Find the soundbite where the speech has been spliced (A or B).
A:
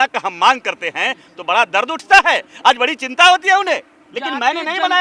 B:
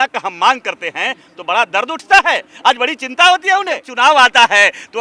B